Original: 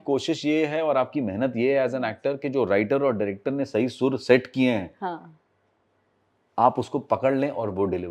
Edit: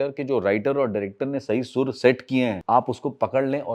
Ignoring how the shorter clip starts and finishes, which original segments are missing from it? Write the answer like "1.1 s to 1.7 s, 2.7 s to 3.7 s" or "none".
4.9 s to 6.5 s